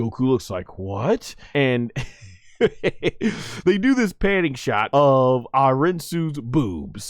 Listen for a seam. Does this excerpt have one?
yes; 2 cuts; at 1.4 s, 4.8 s

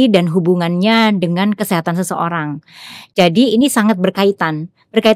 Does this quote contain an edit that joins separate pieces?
no; 0 cuts

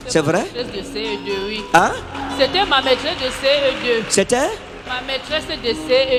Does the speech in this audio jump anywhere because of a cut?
no; 0 cuts

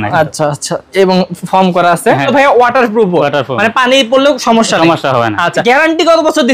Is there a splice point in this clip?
yes; 2 cuts; at 2.3 s, 5.6 s

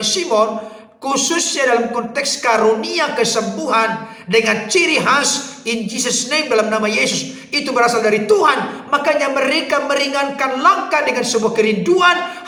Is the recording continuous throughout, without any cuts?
yes; 0 cuts

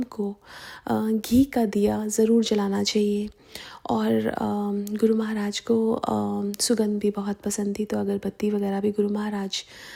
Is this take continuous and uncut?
yes; 0 cuts

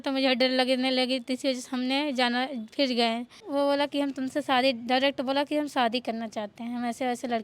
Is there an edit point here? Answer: yes; 1 cut; at 3.5 s

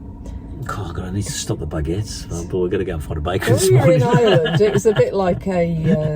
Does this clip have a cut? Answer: no; 0 cuts

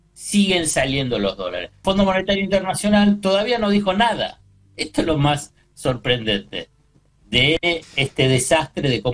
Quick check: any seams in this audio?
yes; 1 cut; at 1.8 s

